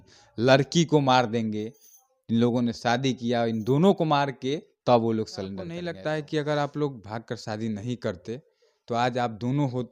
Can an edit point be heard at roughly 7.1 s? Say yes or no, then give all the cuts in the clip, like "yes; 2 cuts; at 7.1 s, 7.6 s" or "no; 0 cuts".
no; 1 cut; at 5.7 s